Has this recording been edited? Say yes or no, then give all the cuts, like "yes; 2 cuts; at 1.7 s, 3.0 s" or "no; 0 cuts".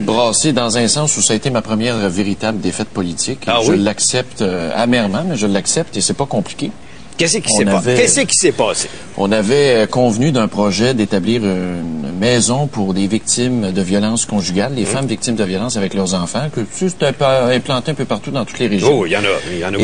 yes; 1 cut; at 17.7 s